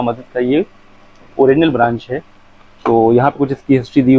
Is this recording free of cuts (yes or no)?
yes